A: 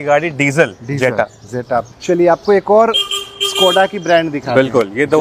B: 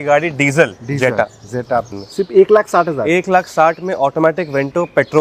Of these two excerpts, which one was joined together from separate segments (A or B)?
B